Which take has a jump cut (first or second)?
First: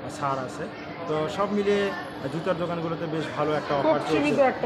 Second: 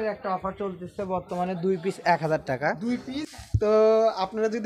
second